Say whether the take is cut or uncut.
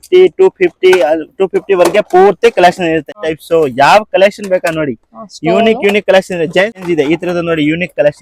cut